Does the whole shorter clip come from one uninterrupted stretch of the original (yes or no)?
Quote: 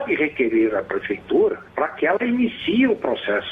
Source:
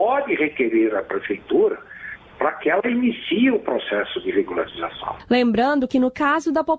no